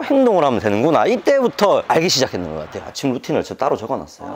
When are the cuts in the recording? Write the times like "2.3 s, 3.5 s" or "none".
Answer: 2.8 s